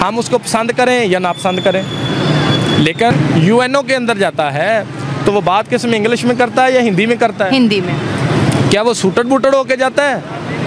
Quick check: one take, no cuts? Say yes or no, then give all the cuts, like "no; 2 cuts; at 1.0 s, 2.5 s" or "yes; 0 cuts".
no; 1 cut; at 3.1 s